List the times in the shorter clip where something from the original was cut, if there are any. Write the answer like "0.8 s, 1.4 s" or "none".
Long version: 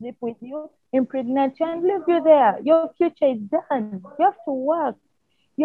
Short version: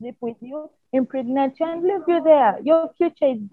none